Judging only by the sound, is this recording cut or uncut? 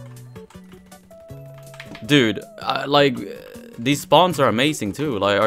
cut